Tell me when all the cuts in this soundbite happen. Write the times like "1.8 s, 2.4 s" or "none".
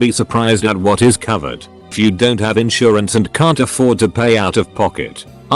1.9 s